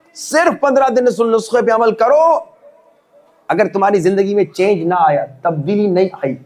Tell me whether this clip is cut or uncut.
uncut